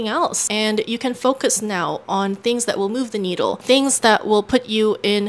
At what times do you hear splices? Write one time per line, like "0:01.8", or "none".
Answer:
none